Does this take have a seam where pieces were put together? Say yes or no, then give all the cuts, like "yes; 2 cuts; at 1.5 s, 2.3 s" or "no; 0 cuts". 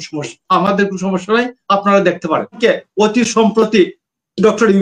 yes; 1 cut; at 2.6 s